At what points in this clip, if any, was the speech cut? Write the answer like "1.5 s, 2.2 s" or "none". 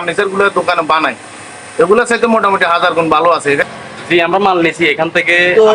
3.7 s